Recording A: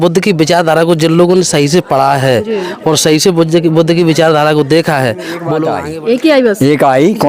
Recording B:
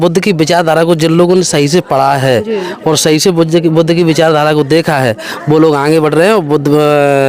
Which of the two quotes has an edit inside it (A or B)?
A